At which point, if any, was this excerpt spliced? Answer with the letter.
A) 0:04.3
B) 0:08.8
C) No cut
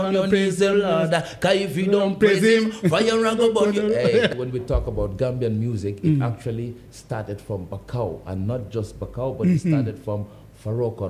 A